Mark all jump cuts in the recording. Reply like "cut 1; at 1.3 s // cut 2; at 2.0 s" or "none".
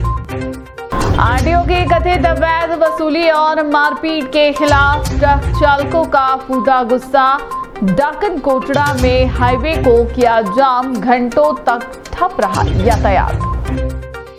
none